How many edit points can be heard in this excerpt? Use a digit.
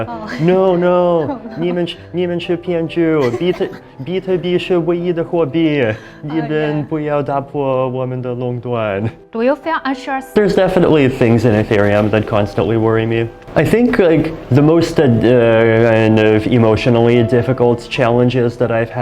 2